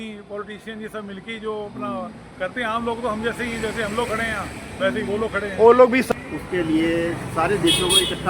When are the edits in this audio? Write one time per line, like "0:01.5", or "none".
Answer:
0:06.1